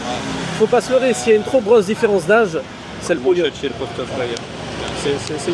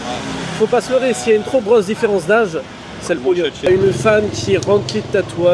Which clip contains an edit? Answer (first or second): second